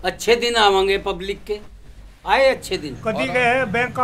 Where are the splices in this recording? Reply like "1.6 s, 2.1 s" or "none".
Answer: 2.9 s